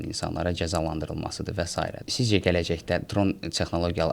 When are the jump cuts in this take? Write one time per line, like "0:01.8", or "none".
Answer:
0:02.1